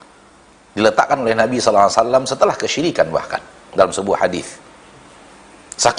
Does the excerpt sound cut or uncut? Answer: uncut